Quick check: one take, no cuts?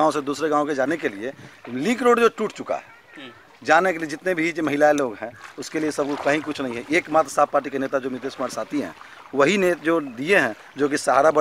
yes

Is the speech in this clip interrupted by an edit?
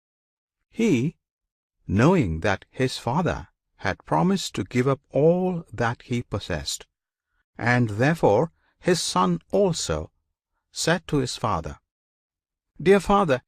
no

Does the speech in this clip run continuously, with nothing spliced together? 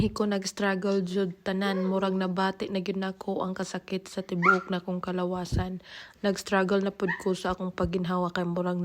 yes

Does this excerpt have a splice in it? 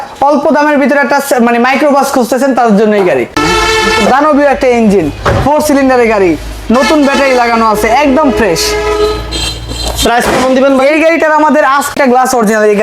yes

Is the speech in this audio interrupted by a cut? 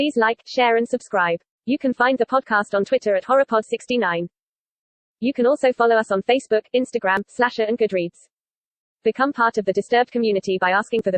yes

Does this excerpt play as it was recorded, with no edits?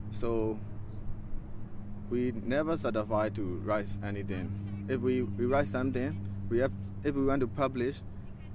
no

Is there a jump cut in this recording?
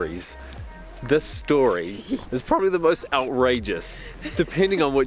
no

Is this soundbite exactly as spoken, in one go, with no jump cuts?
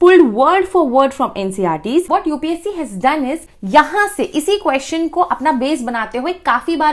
no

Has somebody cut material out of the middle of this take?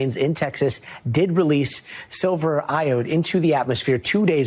no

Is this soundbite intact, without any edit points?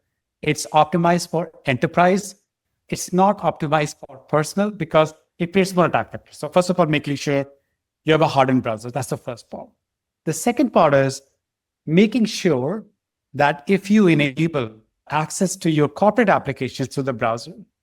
yes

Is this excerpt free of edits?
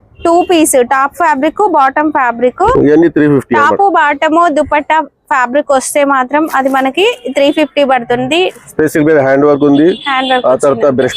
no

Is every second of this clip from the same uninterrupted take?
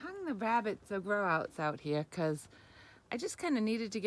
yes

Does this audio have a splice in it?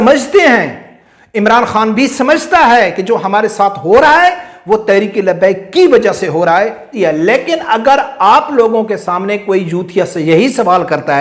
yes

